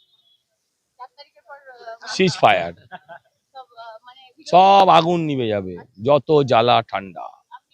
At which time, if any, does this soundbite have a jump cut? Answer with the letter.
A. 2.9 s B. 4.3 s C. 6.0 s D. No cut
D